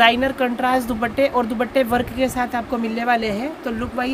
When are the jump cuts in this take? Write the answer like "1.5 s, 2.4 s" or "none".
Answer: none